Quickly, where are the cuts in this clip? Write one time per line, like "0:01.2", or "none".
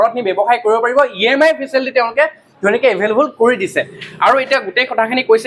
none